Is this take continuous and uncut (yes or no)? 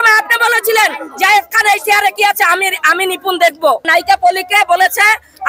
no